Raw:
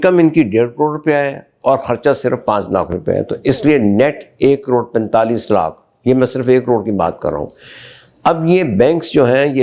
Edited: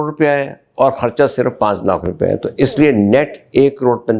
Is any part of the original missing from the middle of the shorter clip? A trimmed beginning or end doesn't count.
no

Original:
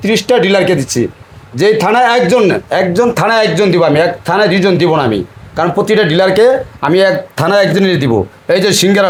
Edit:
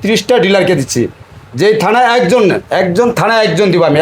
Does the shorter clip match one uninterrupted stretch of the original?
yes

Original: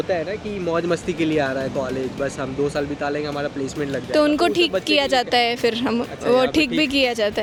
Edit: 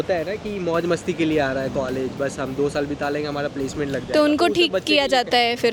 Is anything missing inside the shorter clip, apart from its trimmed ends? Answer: no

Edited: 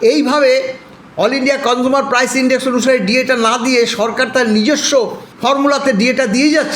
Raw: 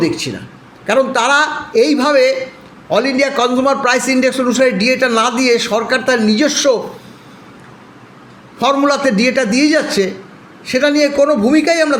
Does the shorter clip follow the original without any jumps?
no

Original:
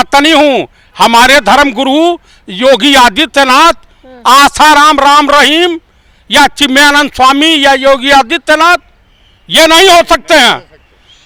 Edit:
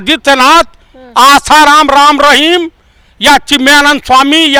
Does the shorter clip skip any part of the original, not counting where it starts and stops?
no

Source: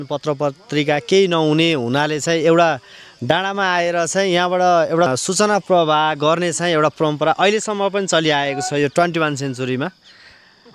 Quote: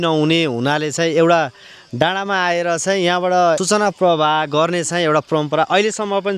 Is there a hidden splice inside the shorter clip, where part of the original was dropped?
yes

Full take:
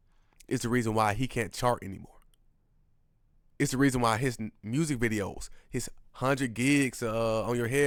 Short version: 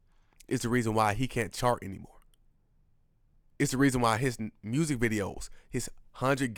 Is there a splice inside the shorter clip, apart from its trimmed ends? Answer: no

